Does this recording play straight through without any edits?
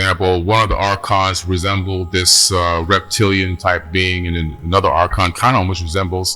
yes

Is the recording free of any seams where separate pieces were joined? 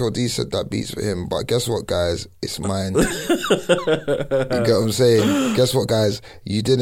yes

